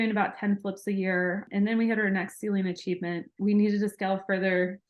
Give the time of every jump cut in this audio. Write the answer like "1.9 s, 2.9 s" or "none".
1.5 s, 3.3 s

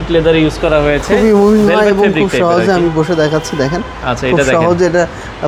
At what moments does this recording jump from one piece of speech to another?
none

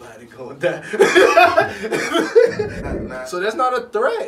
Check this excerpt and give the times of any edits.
2.8 s

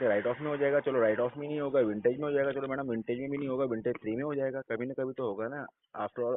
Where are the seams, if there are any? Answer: none

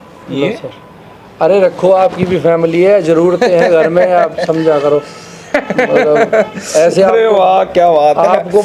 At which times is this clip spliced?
none

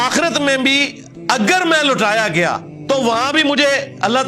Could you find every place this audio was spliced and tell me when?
2.7 s

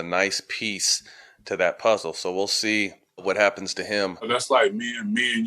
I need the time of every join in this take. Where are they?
4.3 s

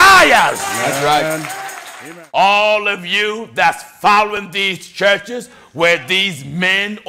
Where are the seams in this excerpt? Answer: 2.0 s

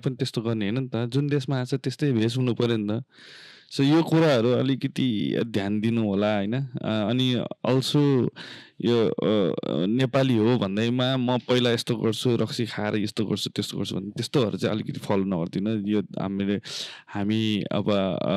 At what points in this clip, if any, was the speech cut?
none

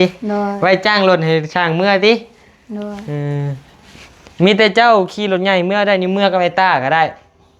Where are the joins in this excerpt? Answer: none

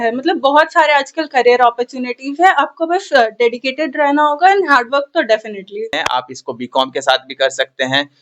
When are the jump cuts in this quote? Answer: 6.0 s

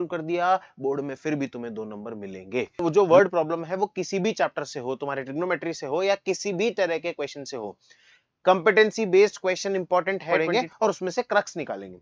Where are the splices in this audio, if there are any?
2.8 s, 10.4 s

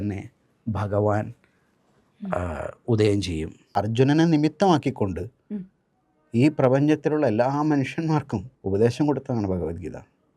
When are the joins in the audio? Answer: 3.6 s, 8.5 s

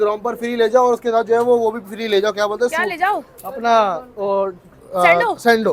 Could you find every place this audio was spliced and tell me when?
none

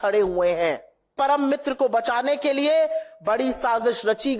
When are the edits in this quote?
1.1 s

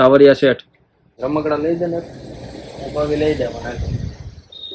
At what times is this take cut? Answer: 1.1 s

